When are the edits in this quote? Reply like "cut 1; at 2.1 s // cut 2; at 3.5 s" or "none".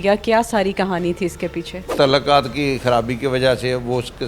cut 1; at 1.9 s

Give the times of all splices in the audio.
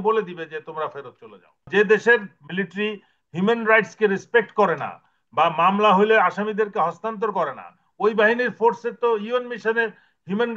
cut 1; at 1.7 s

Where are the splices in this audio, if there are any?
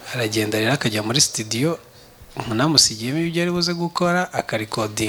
none

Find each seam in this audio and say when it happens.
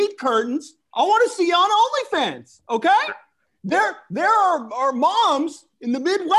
cut 1; at 3.4 s

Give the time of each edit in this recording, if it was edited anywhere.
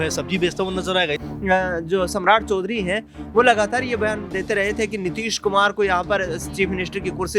cut 1; at 1.2 s

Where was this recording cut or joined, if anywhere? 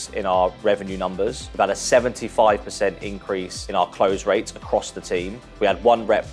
cut 1; at 1.4 s // cut 2; at 3.6 s // cut 3; at 5.4 s

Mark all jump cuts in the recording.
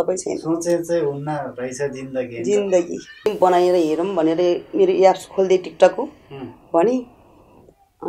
cut 1; at 3.3 s

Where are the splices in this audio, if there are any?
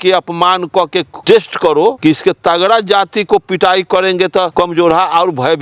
cut 1; at 1.1 s // cut 2; at 2.0 s // cut 3; at 4.5 s

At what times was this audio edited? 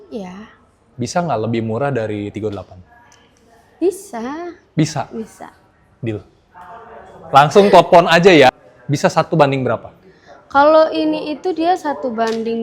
cut 1; at 8.6 s

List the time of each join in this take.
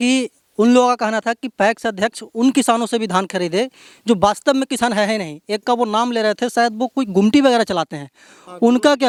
none

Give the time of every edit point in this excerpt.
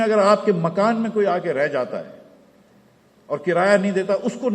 none

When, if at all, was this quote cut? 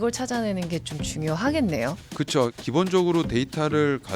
cut 1; at 2.3 s

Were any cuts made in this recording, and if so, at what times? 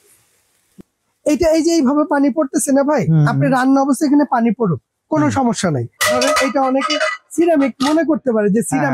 cut 1; at 5.9 s

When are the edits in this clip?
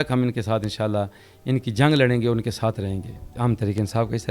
cut 1; at 3.2 s

